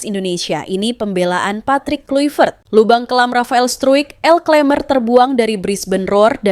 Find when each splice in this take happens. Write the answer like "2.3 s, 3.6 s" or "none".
2.6 s